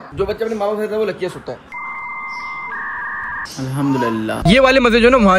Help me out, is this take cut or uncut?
cut